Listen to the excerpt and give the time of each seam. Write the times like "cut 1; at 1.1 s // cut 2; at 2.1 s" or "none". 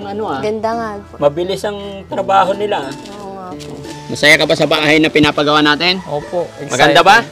cut 1; at 3.8 s // cut 2; at 4.8 s

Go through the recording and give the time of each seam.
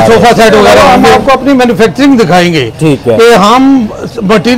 cut 1; at 1.1 s

